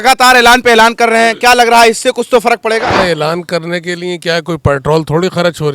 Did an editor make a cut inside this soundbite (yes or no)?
yes